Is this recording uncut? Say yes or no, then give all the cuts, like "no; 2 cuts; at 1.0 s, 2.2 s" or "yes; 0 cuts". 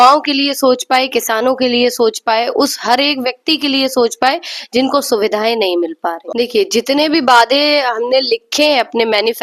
no; 1 cut; at 6.2 s